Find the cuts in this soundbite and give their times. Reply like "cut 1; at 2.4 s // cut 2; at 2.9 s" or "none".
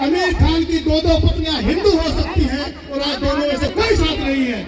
none